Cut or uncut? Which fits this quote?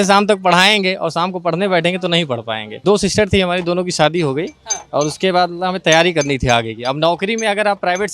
cut